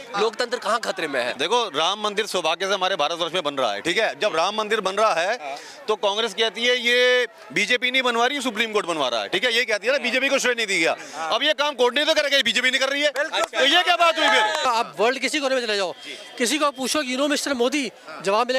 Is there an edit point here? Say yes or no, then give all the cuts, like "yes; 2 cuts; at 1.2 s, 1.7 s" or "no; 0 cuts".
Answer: yes; 2 cuts; at 1.3 s, 14.7 s